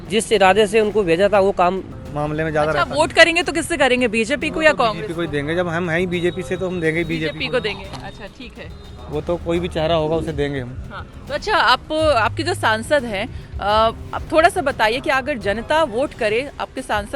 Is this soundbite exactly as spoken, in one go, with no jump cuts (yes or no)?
no